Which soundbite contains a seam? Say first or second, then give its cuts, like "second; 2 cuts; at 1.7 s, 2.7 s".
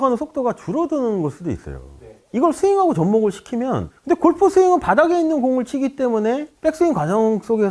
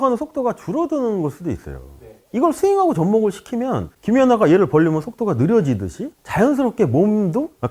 second; 1 cut; at 3.9 s